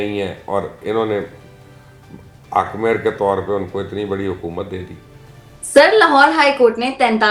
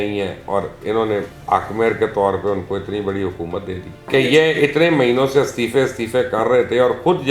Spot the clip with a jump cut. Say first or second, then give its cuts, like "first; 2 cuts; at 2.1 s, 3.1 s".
second; 2 cuts; at 1.4 s, 4.0 s